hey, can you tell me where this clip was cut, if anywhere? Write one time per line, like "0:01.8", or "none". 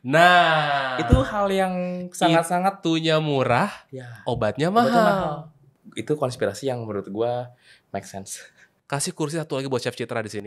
none